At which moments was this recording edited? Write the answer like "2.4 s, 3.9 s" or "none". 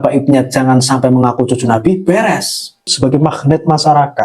2.9 s